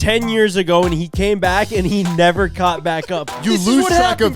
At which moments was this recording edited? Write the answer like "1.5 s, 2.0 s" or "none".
3.3 s